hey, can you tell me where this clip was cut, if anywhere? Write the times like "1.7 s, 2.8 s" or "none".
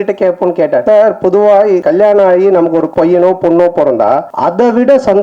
0.8 s, 1.8 s, 2.9 s, 4.3 s